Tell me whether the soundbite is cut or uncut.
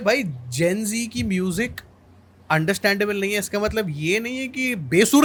uncut